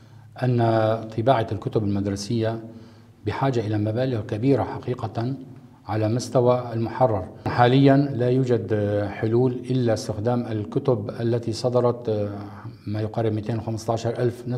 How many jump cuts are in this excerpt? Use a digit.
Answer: 1